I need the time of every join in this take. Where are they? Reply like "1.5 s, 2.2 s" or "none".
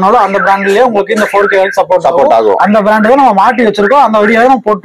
none